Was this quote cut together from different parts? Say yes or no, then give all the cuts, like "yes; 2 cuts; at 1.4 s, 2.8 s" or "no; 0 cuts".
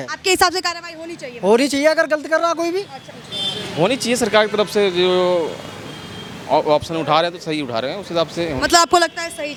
no; 0 cuts